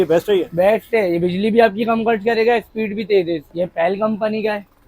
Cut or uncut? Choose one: cut